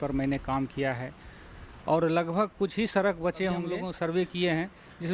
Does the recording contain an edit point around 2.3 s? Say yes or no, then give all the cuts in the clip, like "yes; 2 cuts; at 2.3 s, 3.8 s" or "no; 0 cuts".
no; 1 cut; at 3.8 s